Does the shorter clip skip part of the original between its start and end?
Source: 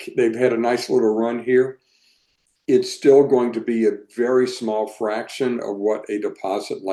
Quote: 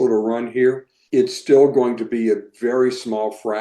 yes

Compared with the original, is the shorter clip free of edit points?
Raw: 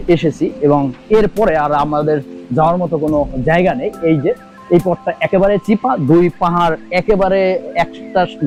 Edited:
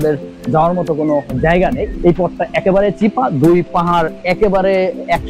no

